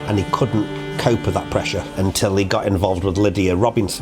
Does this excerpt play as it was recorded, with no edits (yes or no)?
no